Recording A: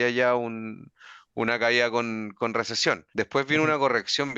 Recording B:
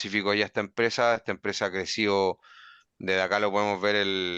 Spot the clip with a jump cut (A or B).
A